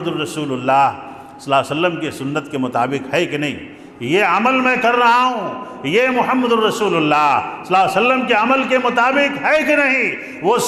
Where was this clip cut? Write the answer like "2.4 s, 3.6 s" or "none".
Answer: none

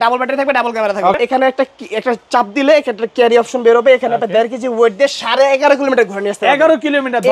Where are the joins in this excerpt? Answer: 1.2 s

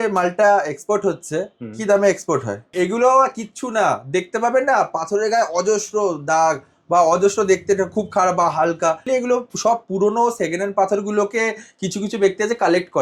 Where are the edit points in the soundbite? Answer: 2.7 s, 9.0 s

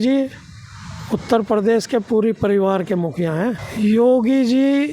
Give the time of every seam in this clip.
3.7 s

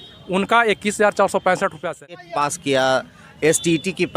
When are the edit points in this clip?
2.2 s

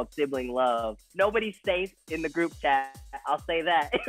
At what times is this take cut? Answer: 1.0 s

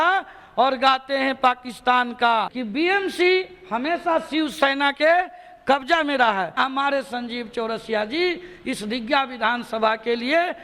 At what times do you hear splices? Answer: 2.6 s, 6.5 s

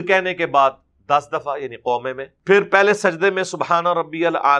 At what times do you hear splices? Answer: 2.3 s

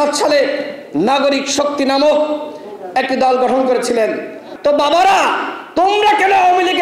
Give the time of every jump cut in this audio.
4.4 s

